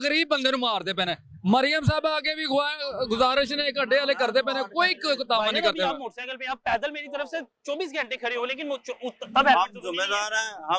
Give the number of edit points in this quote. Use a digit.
0